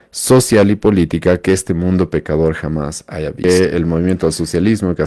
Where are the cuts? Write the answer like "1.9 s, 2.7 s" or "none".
3.4 s

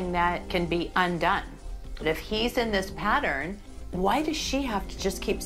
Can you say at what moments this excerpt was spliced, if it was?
none

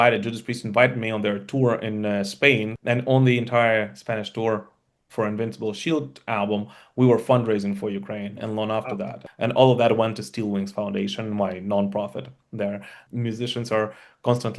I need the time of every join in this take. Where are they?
2.7 s, 9.2 s, 12.9 s

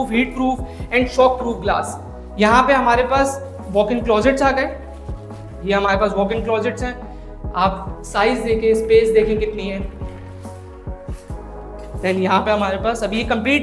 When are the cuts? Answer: none

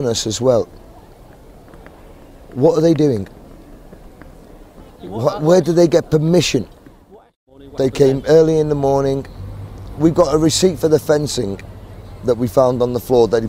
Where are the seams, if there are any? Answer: 3.0 s

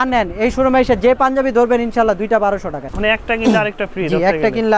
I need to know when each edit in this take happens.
2.8 s

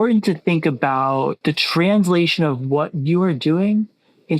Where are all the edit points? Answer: 1.4 s

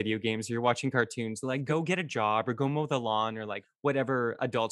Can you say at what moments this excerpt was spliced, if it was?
1.6 s

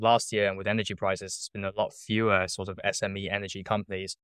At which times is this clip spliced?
none

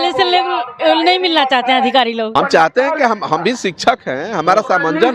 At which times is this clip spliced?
2.3 s

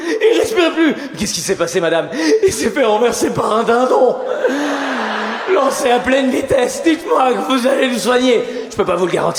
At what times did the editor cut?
none

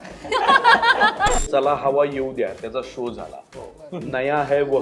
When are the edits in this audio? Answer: 1.4 s

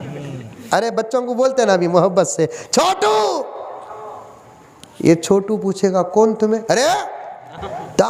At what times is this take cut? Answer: none

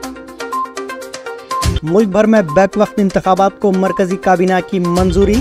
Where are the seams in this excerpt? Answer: 1.7 s

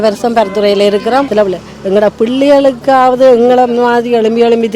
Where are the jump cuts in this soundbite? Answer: 1.3 s

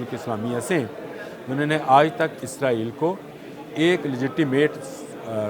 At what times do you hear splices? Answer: none

